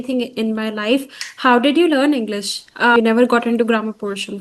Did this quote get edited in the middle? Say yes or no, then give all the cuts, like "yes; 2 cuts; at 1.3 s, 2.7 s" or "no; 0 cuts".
yes; 1 cut; at 2.9 s